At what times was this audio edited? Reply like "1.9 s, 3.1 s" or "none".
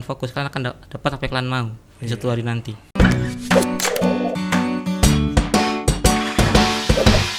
none